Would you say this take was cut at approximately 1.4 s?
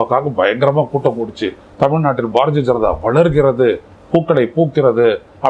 no; 0 cuts

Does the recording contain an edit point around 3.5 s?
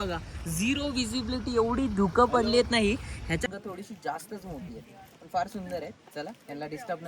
yes; 1 cut; at 3.5 s

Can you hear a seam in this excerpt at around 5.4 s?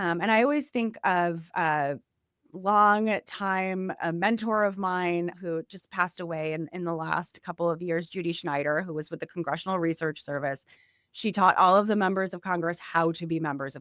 yes; 1 cut; at 5.4 s

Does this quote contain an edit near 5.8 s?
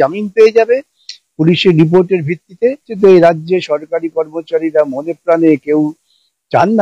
no; 1 cut; at 2.9 s

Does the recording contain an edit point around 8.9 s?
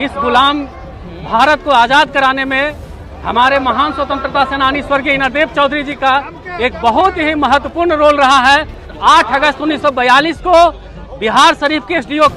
yes; 1 cut; at 8.9 s

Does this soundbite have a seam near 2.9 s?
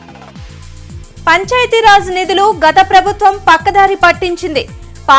no; 1 cut; at 1.0 s

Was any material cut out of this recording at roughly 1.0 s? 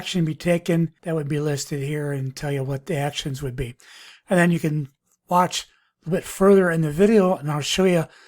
yes; 1 cut; at 1.0 s

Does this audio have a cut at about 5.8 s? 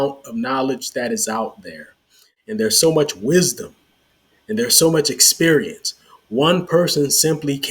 no; 1 cut; at 2.3 s

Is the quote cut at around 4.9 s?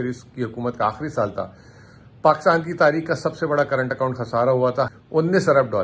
yes; 1 cut; at 4.9 s

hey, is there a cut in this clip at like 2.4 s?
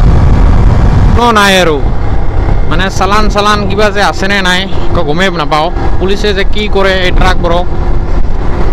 no; 1 cut; at 1.2 s

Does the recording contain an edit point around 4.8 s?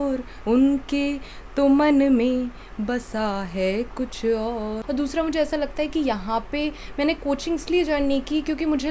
yes; 1 cut; at 4.8 s

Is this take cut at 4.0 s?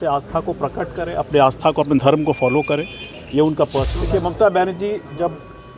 yes; 1 cut; at 4.0 s

